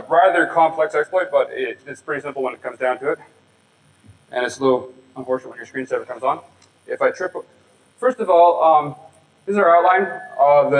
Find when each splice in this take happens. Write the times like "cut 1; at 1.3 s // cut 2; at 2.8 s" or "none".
none